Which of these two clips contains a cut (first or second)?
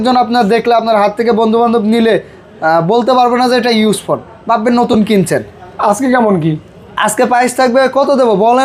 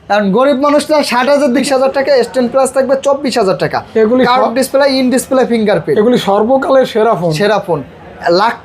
second